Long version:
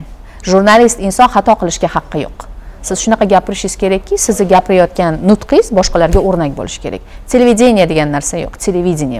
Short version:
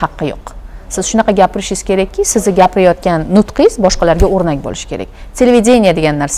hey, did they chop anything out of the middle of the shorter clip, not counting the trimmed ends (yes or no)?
no